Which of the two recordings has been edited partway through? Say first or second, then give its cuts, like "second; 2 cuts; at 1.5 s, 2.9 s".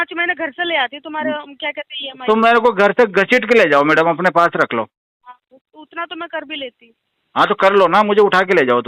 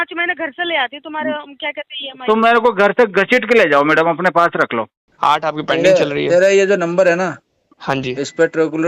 second; 1 cut; at 5.0 s